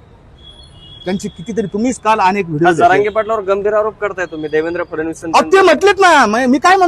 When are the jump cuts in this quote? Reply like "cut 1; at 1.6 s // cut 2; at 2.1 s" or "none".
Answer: none